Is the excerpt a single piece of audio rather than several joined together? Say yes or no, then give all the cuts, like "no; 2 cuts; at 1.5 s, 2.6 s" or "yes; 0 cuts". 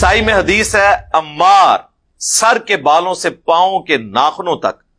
yes; 0 cuts